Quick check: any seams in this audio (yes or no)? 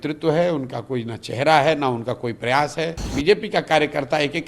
yes